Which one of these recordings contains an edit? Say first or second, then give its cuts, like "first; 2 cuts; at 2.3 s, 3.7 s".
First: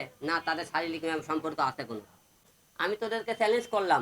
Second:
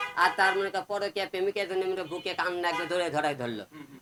first; 1 cut; at 2.4 s